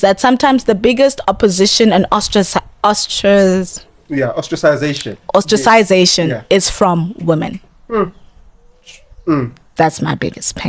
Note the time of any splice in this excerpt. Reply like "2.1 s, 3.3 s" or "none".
none